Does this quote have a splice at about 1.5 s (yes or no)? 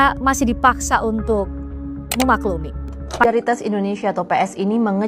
no